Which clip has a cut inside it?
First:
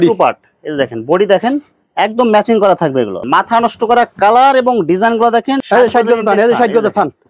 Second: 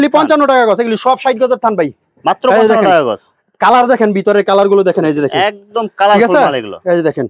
first; 2 cuts; at 3.2 s, 5.6 s

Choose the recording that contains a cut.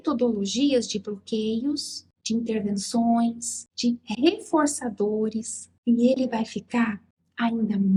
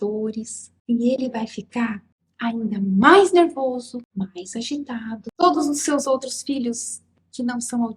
second; 2 cuts; at 4.0 s, 5.2 s

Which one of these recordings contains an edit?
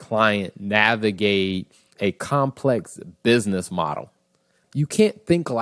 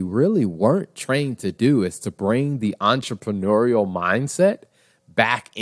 first; 2 cuts; at 1.9 s, 4.6 s

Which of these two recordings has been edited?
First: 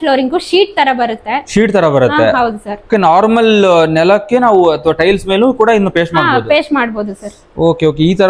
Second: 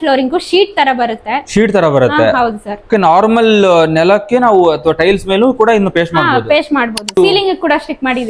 second; 1 cut; at 7.2 s

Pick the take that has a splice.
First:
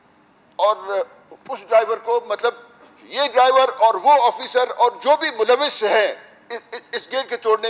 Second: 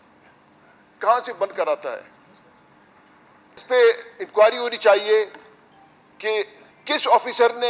second; 1 cut; at 3.6 s

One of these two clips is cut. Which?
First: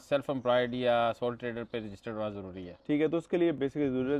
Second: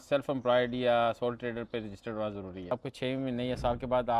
second; 1 cut; at 2.7 s

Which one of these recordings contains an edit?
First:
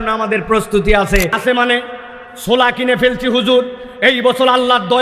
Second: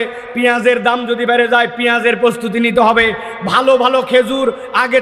first; 1 cut; at 1.4 s

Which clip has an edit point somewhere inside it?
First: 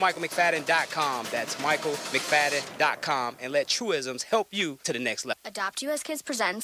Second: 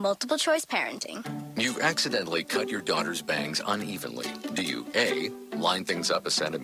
first; 1 cut; at 5.4 s

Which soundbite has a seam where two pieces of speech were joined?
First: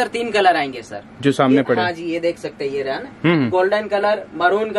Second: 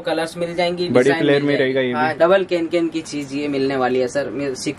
second; 1 cut; at 2.1 s

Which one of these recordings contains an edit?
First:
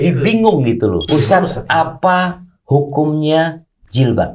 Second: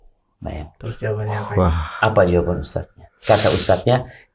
first; 1 cut; at 1.0 s

